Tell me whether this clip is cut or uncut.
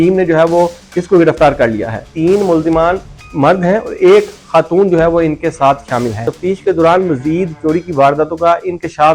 cut